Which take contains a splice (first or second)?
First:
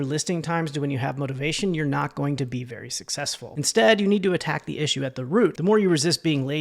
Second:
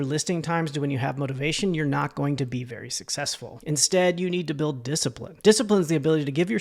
first